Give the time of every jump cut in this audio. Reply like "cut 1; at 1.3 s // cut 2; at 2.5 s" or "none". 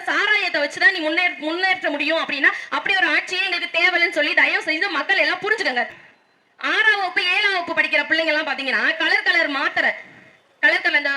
cut 1; at 5.9 s